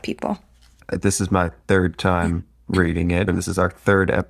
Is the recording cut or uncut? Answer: cut